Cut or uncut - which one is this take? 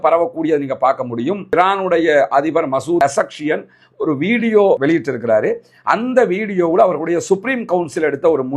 uncut